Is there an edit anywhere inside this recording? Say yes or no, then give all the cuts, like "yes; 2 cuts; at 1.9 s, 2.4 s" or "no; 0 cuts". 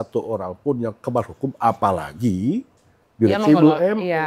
no; 0 cuts